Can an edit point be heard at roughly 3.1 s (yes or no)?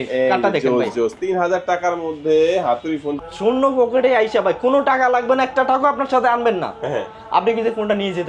yes